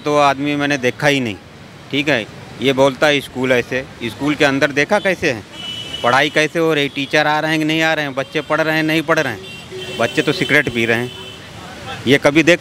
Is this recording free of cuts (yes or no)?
yes